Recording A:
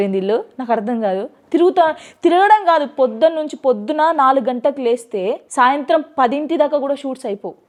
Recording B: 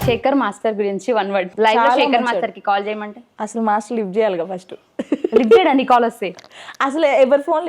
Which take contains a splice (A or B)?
B